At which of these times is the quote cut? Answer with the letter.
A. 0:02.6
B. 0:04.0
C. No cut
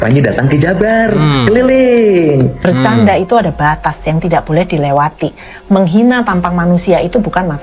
A